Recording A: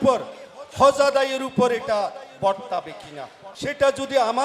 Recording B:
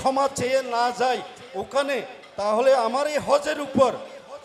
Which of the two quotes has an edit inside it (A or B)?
A